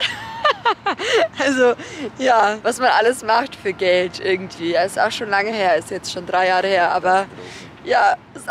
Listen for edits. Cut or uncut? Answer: uncut